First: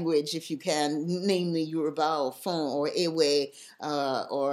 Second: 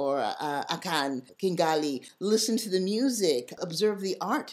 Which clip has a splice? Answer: second; 3 cuts; at 1.3 s, 2.1 s, 3.6 s

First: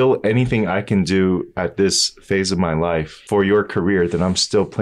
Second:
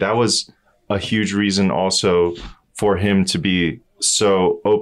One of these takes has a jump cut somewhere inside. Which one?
first; 1 cut; at 3.2 s

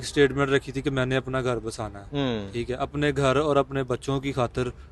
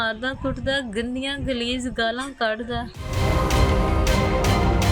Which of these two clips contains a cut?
second; 1 cut; at 3.0 s

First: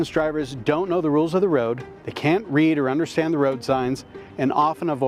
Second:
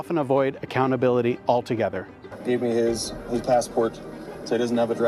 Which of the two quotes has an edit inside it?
second; 1 cut; at 2.3 s

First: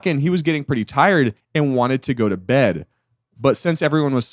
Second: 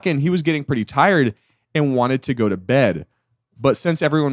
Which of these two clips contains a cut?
first; 1 cut; at 1.4 s

